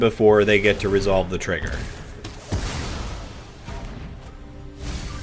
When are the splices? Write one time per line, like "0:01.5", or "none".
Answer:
none